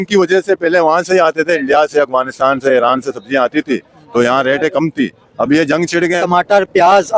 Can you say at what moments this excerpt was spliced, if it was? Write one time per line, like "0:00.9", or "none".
0:06.2